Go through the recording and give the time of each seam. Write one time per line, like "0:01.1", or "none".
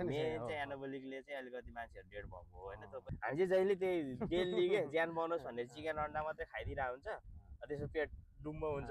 0:03.1